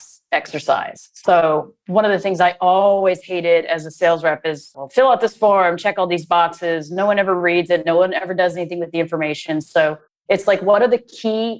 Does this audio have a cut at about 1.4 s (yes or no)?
yes